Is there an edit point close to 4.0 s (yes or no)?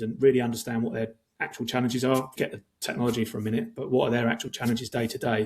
no